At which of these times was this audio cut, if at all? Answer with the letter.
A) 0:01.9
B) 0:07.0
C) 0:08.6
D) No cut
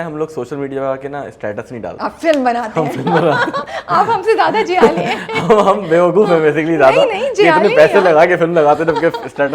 A